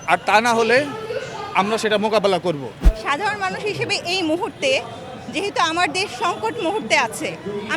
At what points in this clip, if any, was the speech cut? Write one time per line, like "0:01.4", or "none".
0:02.9